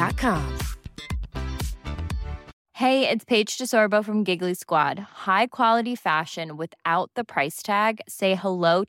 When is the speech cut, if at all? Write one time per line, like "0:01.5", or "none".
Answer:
none